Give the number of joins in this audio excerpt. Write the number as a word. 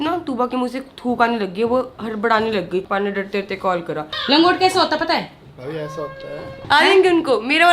three